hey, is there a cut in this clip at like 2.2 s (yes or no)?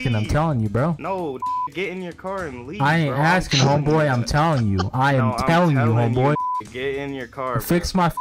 no